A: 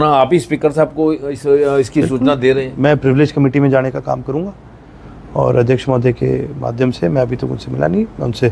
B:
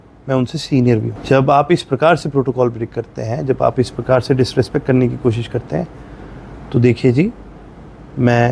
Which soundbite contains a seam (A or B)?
B